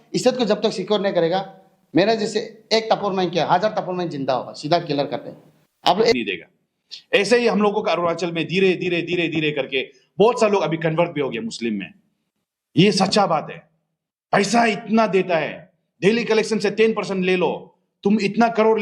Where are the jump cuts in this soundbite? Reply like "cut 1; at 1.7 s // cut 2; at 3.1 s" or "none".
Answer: cut 1; at 6.1 s